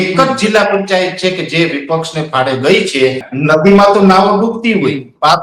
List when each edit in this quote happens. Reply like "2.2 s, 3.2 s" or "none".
3.3 s